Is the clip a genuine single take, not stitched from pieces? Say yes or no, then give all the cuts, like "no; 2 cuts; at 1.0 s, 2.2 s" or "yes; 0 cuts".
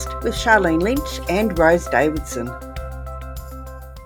yes; 0 cuts